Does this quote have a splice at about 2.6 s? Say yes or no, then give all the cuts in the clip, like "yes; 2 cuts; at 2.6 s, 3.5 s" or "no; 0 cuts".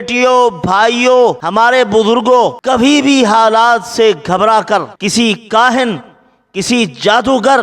yes; 3 cuts; at 1.4 s, 2.6 s, 4.9 s